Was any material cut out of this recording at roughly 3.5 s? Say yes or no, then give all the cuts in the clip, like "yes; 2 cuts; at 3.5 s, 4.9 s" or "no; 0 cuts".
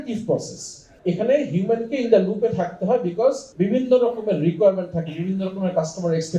yes; 2 cuts; at 0.9 s, 3.5 s